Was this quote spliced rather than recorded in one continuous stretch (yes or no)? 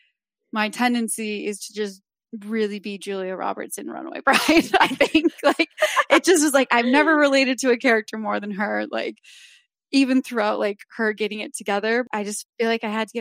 yes